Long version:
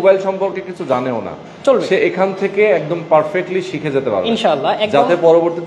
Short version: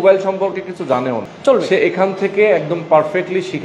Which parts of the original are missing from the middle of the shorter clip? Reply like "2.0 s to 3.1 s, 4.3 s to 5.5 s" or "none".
1.3 s to 1.5 s